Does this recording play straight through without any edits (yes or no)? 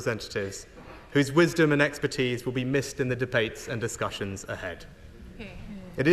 yes